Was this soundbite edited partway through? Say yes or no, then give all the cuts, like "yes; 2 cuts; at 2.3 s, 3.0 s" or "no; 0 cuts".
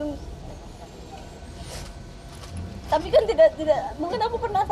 no; 0 cuts